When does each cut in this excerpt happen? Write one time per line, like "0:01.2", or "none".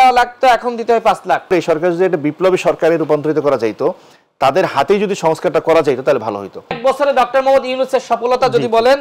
0:01.5
0:06.8

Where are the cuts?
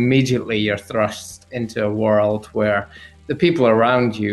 0:01.5

